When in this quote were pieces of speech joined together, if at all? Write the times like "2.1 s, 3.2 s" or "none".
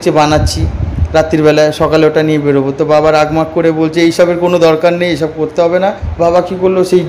6.0 s